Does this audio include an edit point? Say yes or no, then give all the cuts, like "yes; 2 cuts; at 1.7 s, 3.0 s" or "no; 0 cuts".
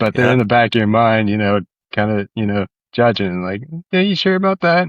no; 0 cuts